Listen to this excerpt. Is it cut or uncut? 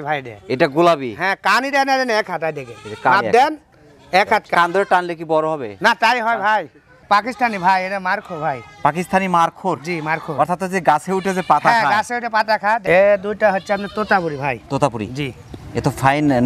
cut